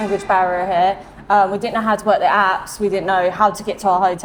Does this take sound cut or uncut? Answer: uncut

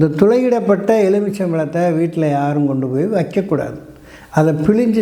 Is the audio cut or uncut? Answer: uncut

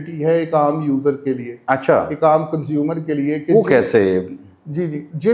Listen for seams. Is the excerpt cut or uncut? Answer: uncut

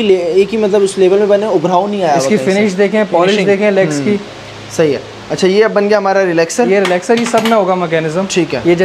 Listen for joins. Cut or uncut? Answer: uncut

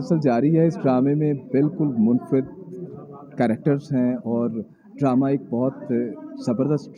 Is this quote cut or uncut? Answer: uncut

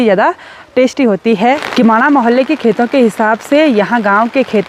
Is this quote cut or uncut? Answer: cut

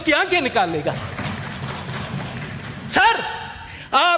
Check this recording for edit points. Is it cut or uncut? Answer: uncut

